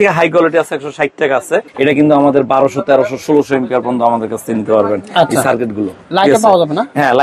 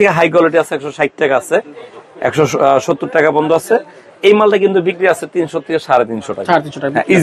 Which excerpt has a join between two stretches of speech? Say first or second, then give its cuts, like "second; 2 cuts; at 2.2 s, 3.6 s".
first; 1 cut; at 1.7 s